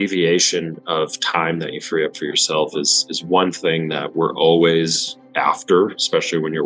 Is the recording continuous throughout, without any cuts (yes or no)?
yes